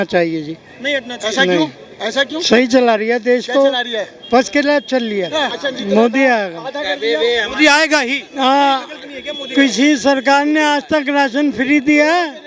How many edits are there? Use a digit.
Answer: 1